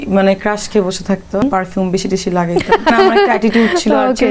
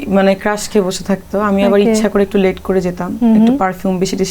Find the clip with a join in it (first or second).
first